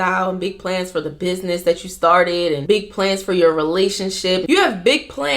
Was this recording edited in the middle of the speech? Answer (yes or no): yes